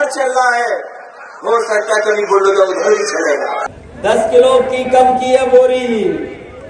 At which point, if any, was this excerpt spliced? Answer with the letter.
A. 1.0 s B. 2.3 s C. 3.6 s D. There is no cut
C